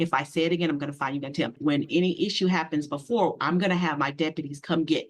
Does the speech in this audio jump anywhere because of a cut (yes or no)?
yes